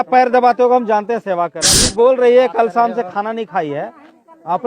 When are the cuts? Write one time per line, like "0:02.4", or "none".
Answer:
0:01.9